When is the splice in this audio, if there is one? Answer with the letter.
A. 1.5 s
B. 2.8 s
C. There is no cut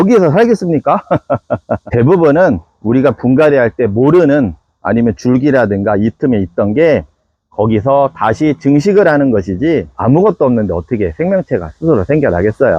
C